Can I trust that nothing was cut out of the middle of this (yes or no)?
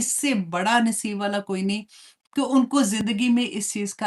yes